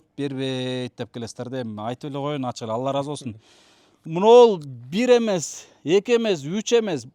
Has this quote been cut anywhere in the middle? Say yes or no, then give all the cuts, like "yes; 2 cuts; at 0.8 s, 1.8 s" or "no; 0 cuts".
no; 0 cuts